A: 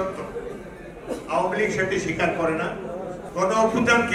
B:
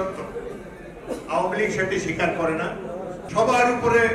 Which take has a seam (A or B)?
B